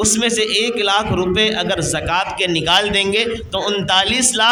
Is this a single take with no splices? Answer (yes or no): yes